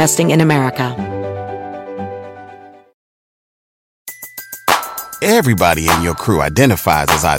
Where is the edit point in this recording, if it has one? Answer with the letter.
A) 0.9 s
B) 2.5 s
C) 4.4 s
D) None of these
A